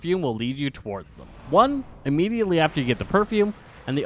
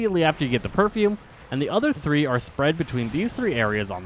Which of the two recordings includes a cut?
first; 1 cut; at 1.3 s

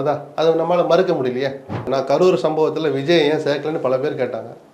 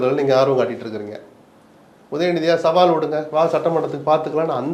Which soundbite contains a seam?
first; 1 cut; at 1.9 s

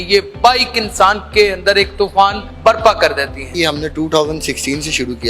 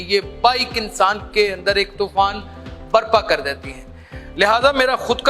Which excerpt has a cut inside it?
first; 2 cuts; at 2.5 s, 3.5 s

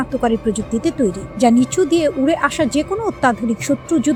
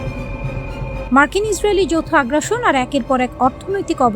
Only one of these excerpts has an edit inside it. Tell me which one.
second; 1 cut; at 1.1 s

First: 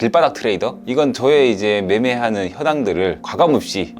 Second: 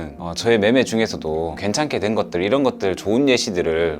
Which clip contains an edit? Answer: second; 1 cut; at 1.6 s

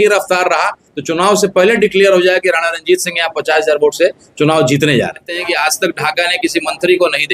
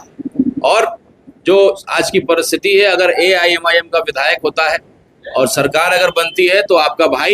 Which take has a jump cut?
first; 1 cut; at 5.4 s

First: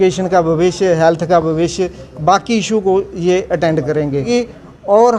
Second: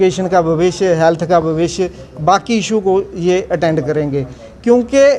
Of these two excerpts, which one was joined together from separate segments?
first; 1 cut; at 4.3 s

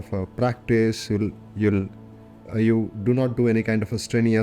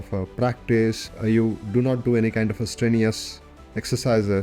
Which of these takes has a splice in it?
second; 1 cut; at 1.0 s

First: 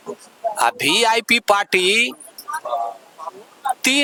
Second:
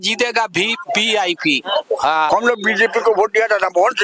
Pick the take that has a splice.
second; 1 cut; at 2.3 s

